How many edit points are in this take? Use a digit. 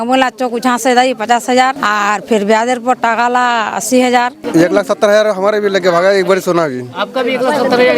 2